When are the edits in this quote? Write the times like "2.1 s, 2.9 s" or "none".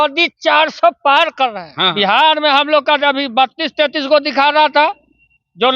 1.9 s